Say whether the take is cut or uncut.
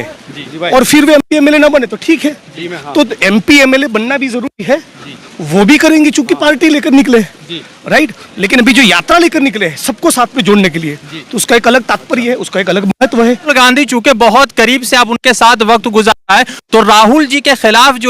cut